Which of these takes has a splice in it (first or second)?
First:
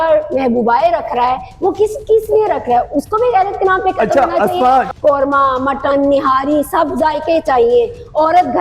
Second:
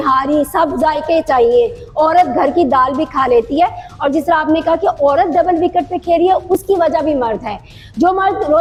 first